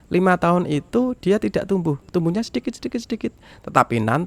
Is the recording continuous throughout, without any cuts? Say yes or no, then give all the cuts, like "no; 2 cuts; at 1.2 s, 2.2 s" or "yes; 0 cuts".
yes; 0 cuts